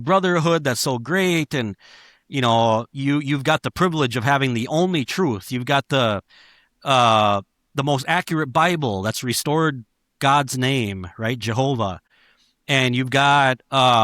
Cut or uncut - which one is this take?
uncut